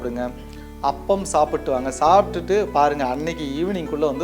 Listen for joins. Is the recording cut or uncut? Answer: uncut